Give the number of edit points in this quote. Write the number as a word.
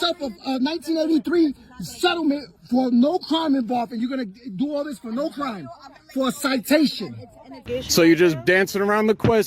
one